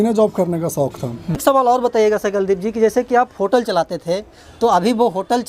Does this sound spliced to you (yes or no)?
yes